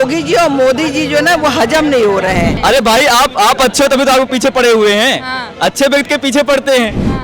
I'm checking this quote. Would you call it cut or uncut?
cut